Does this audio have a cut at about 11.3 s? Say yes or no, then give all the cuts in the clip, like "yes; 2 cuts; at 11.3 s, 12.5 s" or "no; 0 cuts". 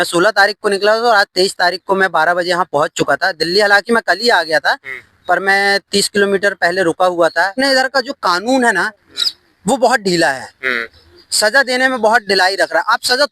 no; 1 cut; at 7.5 s